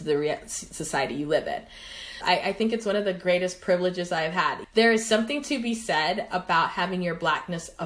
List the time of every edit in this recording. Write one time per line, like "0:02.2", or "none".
0:02.1
0:04.6